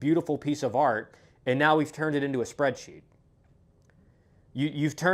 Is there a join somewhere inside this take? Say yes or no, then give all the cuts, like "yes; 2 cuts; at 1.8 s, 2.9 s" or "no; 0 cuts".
no; 0 cuts